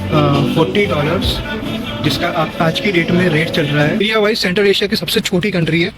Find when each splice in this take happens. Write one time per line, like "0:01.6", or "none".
0:04.0